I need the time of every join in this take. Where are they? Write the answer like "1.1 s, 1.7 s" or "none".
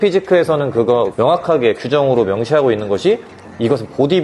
none